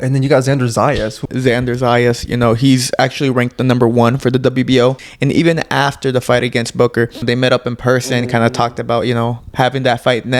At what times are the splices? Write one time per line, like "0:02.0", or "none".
0:01.2
0:05.1
0:07.2